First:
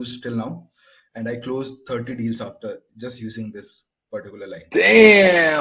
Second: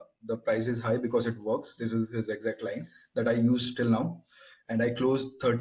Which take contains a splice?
first; 1 cut; at 4.7 s

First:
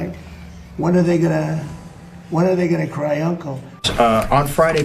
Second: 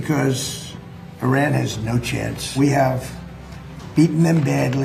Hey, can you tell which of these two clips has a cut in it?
first; 1 cut; at 3.6 s

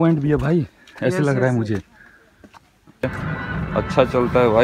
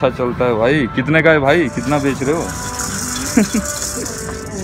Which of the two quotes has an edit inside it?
first; 2 cuts; at 1.1 s, 3.0 s

